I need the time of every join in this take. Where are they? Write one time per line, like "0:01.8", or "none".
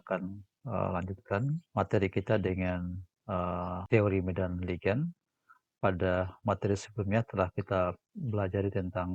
0:01.6
0:03.8